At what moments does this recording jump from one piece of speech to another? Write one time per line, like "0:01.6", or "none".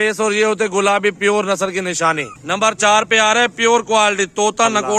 none